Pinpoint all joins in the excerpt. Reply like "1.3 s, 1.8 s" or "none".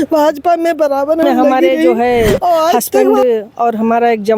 3.2 s